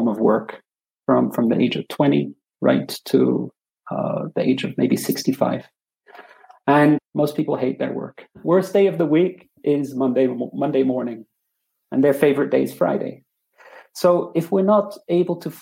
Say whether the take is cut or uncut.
cut